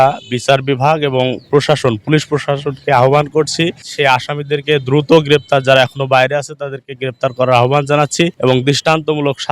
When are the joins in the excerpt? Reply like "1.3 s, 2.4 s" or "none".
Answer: 3.8 s, 8.3 s